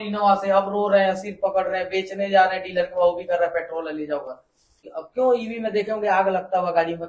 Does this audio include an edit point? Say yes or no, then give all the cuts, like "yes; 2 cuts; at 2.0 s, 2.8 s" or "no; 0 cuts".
yes; 1 cut; at 4.8 s